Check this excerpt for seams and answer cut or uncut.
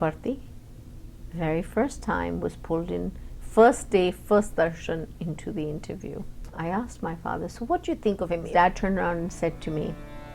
cut